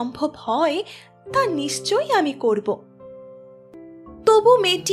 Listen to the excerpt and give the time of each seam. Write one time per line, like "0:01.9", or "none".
0:03.8

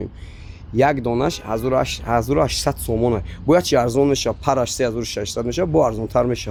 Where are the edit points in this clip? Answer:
none

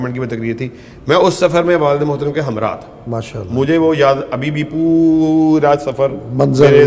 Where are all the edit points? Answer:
none

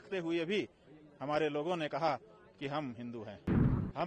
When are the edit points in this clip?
none

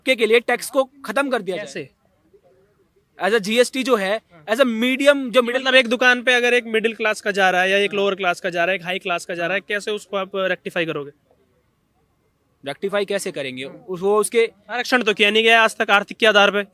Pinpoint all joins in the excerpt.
none

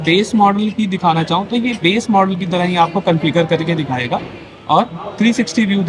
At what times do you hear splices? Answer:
none

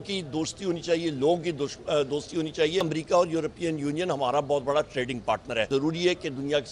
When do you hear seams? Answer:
0:02.9
0:05.7

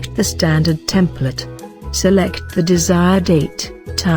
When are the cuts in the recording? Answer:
none

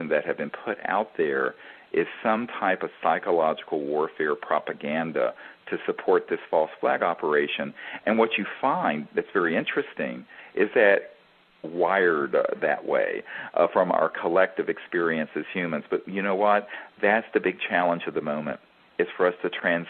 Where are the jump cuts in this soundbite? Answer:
none

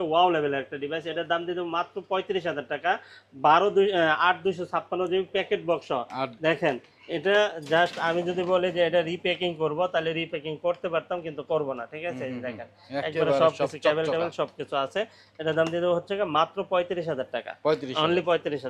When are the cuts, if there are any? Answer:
none

